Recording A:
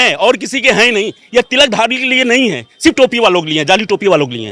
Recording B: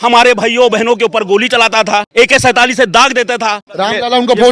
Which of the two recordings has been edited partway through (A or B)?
B